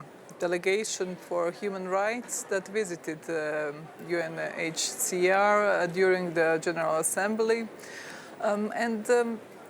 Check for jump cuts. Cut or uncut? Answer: uncut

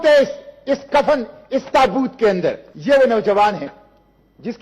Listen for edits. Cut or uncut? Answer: cut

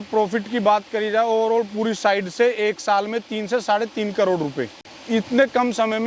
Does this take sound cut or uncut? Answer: cut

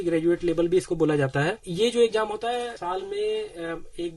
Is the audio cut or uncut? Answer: cut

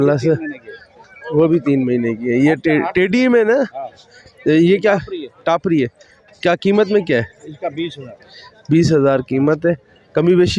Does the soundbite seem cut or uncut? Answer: uncut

